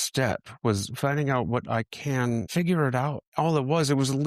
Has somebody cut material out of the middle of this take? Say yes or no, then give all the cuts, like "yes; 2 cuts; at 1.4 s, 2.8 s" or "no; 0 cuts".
yes; 2 cuts; at 2.5 s, 3.2 s